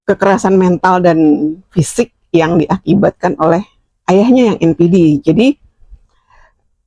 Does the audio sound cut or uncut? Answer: uncut